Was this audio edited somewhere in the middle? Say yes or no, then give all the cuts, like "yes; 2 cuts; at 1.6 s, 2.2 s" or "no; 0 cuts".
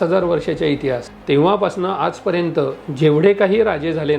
yes; 1 cut; at 1.1 s